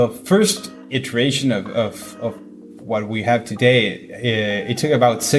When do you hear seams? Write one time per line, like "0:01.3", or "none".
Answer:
none